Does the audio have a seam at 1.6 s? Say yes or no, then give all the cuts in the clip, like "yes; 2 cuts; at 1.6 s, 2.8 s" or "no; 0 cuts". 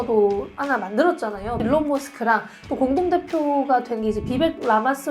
yes; 1 cut; at 1.6 s